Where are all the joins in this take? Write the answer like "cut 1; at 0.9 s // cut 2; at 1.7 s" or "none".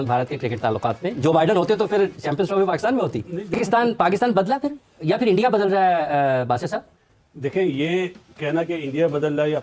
none